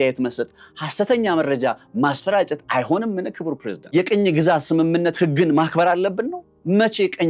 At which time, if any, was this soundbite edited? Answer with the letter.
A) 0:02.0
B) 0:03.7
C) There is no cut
B